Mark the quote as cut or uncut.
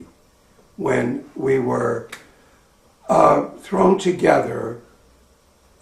uncut